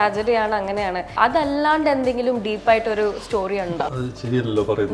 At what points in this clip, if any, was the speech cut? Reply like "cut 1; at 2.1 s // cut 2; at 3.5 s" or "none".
cut 1; at 1.2 s // cut 2; at 3.7 s